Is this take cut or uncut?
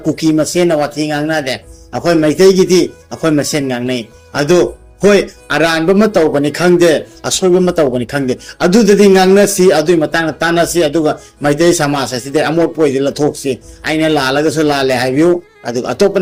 uncut